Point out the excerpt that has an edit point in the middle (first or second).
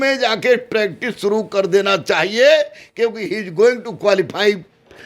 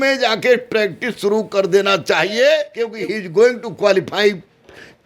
second